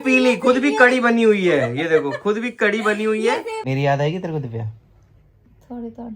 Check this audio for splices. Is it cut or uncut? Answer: cut